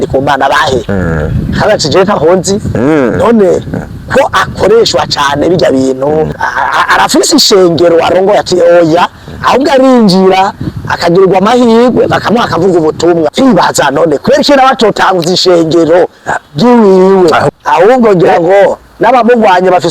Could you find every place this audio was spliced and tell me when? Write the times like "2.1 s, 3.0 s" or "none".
6.4 s, 13.3 s, 17.5 s